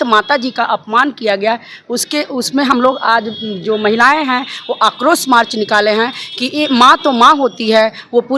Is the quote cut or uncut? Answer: uncut